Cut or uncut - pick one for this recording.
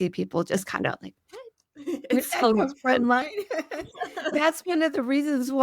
cut